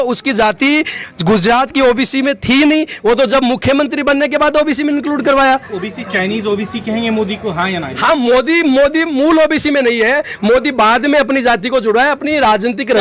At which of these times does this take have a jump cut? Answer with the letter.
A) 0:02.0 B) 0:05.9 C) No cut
C